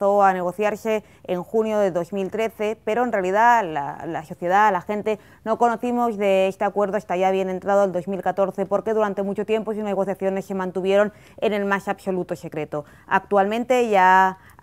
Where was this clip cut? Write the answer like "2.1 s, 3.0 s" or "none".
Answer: 13.3 s

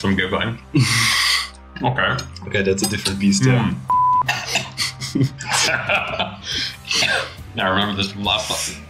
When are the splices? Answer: 4.2 s

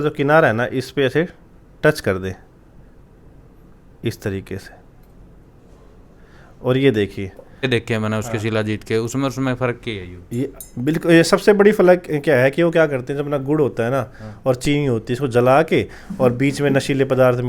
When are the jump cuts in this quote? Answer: 7.7 s

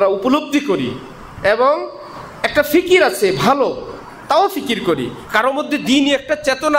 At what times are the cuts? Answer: none

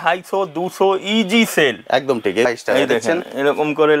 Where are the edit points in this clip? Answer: 2.5 s

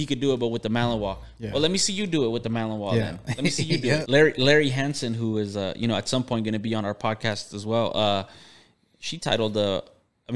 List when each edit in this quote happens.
4.0 s

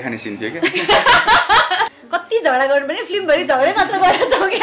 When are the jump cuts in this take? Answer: 2.0 s

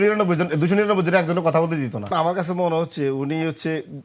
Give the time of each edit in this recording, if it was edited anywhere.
2.0 s

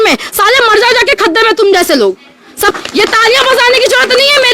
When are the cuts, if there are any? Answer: 2.7 s

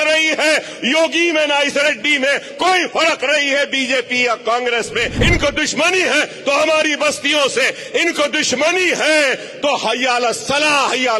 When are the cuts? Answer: 5.1 s

